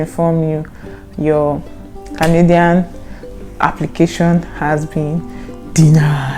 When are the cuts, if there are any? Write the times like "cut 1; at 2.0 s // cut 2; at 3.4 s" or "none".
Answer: none